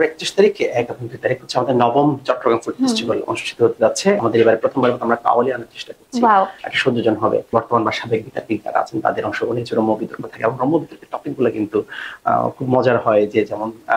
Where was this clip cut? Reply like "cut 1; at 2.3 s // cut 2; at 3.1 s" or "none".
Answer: cut 1; at 4.2 s // cut 2; at 7.5 s

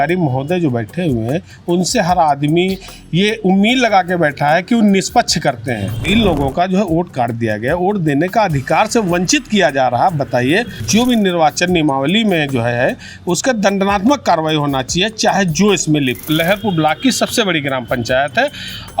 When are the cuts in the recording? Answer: cut 1; at 6.0 s // cut 2; at 10.8 s // cut 3; at 16.2 s

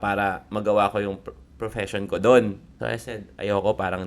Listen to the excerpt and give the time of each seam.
cut 1; at 2.7 s

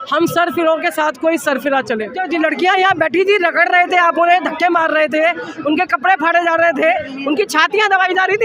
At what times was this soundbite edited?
cut 1; at 2.2 s

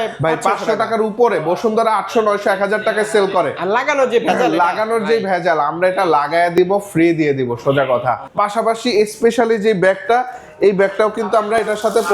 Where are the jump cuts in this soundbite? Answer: none

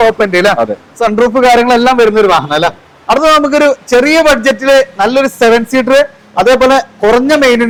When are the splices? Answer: none

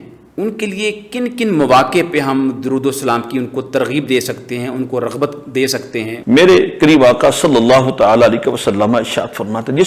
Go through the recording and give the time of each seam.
cut 1; at 6.1 s

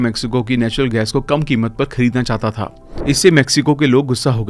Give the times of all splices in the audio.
cut 1; at 2.8 s

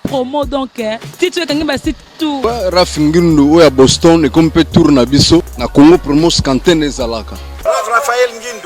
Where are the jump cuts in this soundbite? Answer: cut 1; at 2.4 s // cut 2; at 5.6 s // cut 3; at 7.5 s

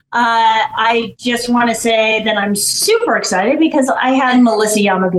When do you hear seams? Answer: cut 1; at 4.3 s

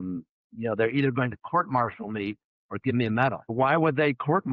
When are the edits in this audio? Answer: cut 1; at 3.5 s

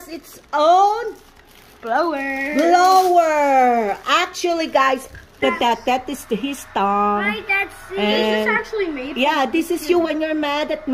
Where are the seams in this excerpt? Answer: cut 1; at 5.4 s

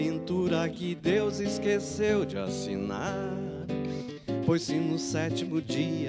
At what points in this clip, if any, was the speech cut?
none

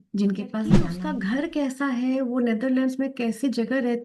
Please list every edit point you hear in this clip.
cut 1; at 0.9 s

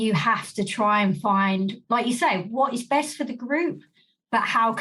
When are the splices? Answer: cut 1; at 1.8 s

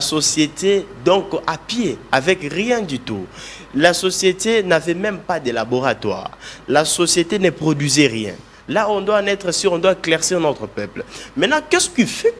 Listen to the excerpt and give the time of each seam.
none

